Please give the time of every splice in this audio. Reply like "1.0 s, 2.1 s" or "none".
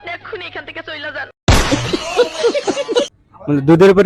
3.2 s

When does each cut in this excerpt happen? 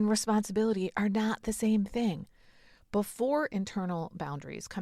none

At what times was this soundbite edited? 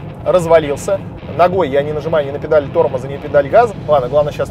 1.2 s, 3.7 s

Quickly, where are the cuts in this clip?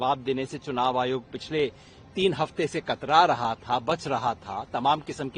none

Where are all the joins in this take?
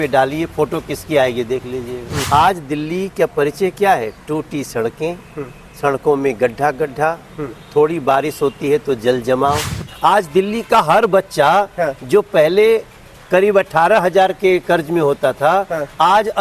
2.1 s, 9.8 s

